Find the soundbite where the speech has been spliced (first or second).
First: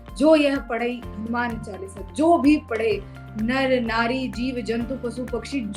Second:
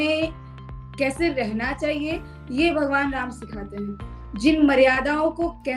second